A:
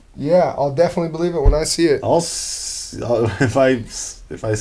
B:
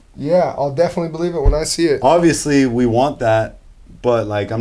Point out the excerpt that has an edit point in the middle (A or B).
B